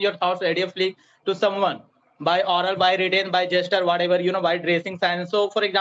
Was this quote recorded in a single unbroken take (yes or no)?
yes